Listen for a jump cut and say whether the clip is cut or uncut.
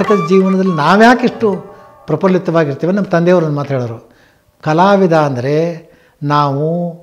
uncut